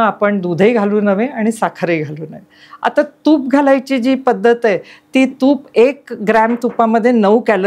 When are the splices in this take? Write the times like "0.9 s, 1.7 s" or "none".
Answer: none